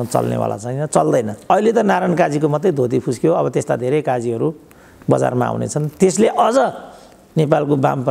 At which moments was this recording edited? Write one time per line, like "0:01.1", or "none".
0:01.5